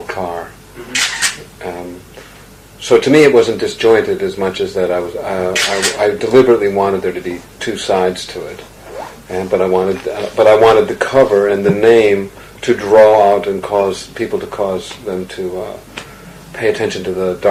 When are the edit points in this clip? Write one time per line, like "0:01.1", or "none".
none